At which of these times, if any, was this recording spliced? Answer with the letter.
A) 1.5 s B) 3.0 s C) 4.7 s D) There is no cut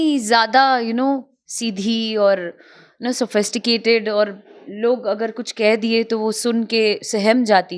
D